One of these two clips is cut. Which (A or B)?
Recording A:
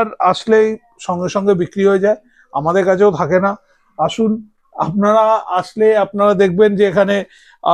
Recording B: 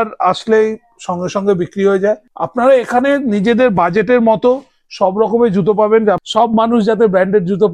B